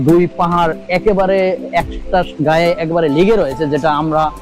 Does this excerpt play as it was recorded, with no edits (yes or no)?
yes